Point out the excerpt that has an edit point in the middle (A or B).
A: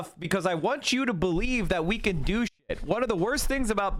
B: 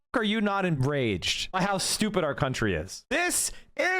B